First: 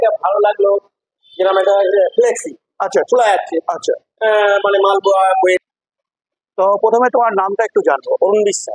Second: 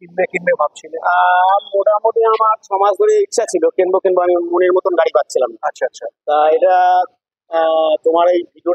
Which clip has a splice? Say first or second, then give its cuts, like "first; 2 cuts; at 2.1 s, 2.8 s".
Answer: first; 1 cut; at 5.6 s